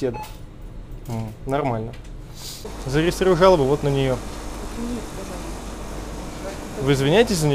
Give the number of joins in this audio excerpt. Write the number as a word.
one